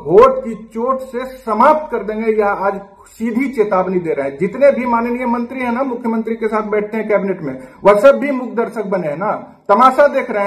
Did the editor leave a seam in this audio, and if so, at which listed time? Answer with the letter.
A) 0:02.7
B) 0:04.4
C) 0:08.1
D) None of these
D